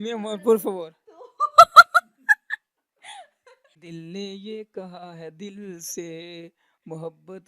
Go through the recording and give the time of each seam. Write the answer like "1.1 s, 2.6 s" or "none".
3.8 s

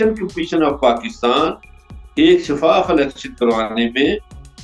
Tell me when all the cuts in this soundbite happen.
none

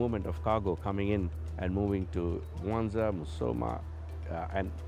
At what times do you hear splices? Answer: none

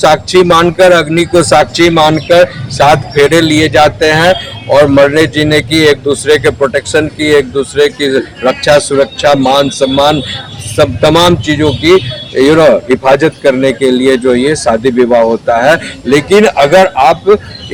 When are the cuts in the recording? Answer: none

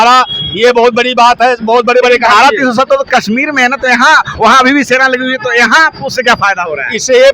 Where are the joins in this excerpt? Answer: none

